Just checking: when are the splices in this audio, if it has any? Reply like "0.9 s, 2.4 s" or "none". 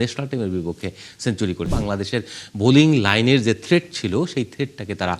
1.7 s